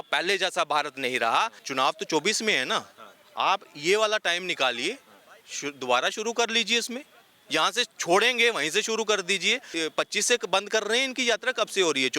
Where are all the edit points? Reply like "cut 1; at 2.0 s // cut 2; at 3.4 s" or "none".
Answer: cut 1; at 1.6 s // cut 2; at 9.7 s